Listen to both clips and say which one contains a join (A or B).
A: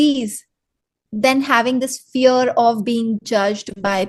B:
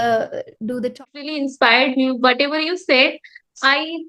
B